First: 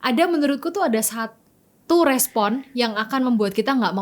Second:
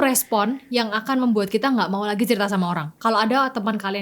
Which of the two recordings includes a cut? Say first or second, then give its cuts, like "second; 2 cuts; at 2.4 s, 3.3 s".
second; 1 cut; at 2.9 s